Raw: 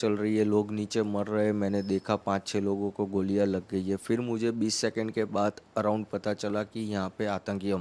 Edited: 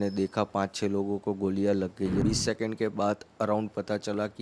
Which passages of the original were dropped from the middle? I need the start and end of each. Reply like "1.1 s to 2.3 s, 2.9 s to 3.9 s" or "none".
3.9 s to 4.6 s